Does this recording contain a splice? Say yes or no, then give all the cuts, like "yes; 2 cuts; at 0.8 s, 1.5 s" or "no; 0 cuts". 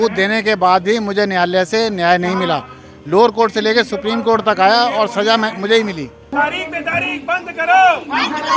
yes; 1 cut; at 6.2 s